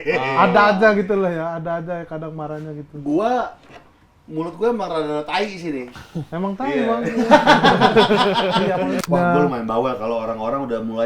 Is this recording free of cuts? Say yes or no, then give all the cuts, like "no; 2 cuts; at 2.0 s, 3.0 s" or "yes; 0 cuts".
no; 1 cut; at 9.0 s